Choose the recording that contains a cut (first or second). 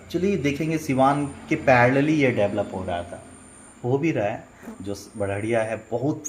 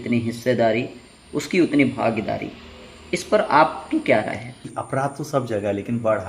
second